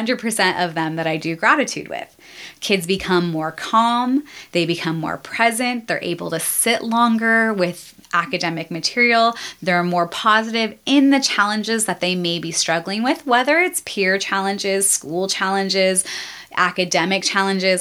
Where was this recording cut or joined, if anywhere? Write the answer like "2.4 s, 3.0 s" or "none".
none